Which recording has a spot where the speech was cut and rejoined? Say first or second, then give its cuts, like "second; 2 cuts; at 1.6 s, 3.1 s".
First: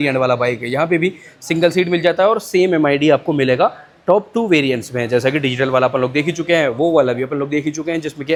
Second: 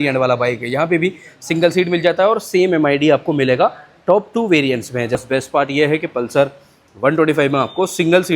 second; 1 cut; at 5.2 s